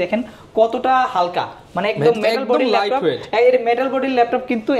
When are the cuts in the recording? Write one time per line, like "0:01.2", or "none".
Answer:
none